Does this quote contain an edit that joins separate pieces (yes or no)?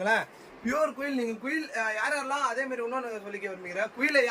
no